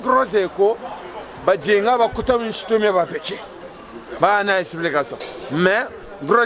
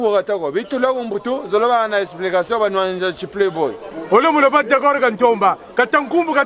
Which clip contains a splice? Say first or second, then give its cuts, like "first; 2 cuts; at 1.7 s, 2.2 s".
second; 1 cut; at 3.8 s